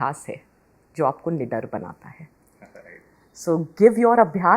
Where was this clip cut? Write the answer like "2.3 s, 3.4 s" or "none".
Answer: none